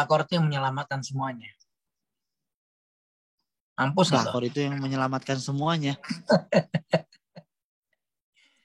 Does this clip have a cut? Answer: no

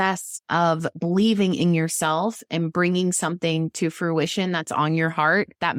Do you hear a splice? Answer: no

